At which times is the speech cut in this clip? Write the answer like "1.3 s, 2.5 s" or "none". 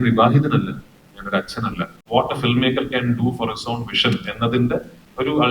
2.0 s